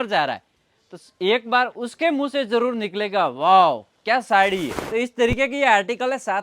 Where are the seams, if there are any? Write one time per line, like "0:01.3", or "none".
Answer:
0:04.8